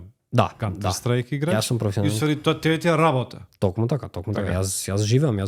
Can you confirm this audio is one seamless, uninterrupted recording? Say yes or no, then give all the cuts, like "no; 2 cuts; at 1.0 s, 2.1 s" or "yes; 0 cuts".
yes; 0 cuts